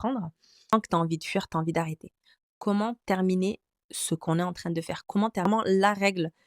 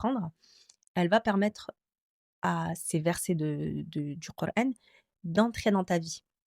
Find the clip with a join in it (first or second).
first